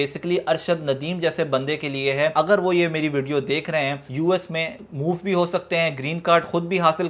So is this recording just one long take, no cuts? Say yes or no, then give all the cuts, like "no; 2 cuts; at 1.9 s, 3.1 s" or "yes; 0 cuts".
no; 2 cuts; at 2.3 s, 4.0 s